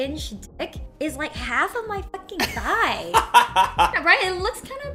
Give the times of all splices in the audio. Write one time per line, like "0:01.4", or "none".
0:03.9